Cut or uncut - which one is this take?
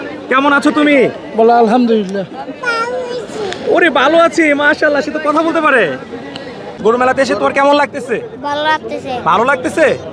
cut